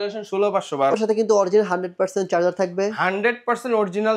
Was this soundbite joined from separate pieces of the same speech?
yes; 1 cut; at 0.9 s

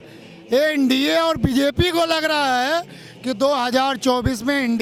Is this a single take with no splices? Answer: yes; 0 cuts

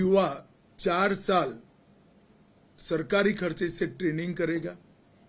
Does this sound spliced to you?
no; 0 cuts

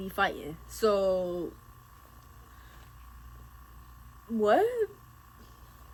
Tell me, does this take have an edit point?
no; 0 cuts

